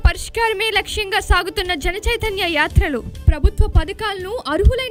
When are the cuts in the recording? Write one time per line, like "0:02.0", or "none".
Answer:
none